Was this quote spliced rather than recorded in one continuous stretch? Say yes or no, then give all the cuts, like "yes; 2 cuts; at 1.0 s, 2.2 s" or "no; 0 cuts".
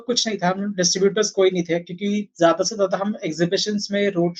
no; 0 cuts